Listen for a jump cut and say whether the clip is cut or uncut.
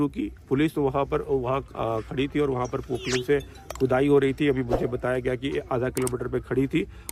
uncut